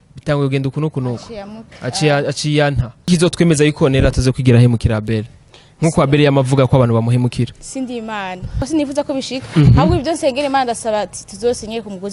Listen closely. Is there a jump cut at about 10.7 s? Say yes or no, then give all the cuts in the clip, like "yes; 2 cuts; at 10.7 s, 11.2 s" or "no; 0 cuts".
no; 2 cuts; at 3.1 s, 8.5 s